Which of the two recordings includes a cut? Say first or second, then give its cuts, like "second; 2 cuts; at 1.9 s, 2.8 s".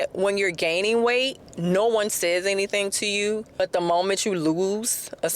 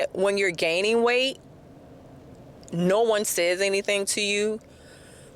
first; 2 cuts; at 1.4 s, 3.5 s